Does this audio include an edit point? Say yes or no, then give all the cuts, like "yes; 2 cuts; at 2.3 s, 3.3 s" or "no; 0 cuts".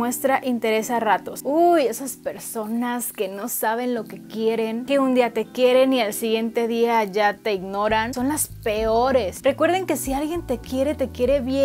no; 0 cuts